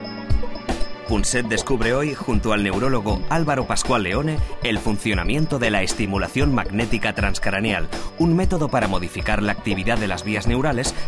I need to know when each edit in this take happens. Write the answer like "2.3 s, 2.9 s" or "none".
8.2 s

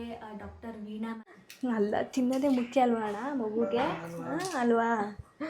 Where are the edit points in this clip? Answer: 1.3 s

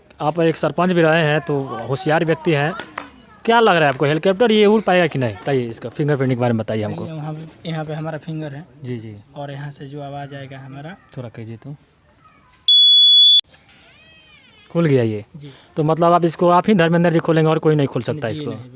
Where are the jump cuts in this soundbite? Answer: 5.4 s, 13.4 s

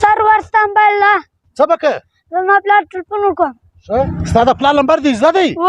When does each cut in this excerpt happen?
4.1 s

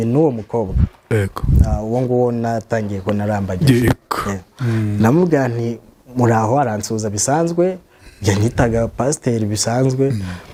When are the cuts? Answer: none

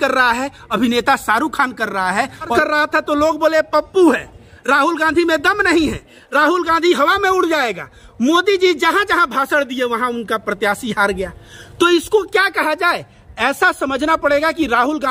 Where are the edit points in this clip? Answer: 2.5 s

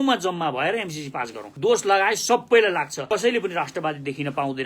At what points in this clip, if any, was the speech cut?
1.4 s, 3.0 s

